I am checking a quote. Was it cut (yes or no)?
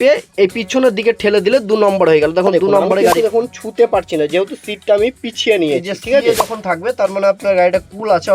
yes